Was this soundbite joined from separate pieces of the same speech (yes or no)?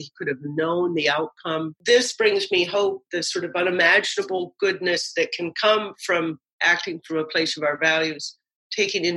yes